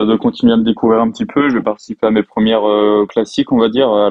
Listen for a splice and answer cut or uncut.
cut